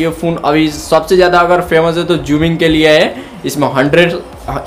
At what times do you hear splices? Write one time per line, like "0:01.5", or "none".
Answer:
none